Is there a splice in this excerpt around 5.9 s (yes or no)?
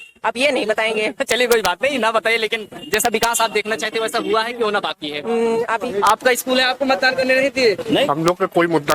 yes